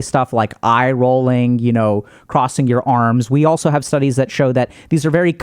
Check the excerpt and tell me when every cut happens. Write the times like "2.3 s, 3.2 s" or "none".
none